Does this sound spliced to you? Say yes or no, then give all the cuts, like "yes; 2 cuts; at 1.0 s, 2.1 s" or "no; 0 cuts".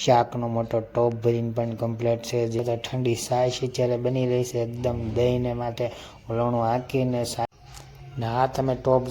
yes; 2 cuts; at 2.6 s, 7.5 s